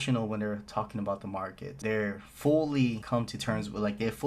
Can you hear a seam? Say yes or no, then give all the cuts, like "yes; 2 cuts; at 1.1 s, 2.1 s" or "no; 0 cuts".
yes; 2 cuts; at 1.7 s, 3.0 s